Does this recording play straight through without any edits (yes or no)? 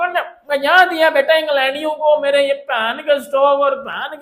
yes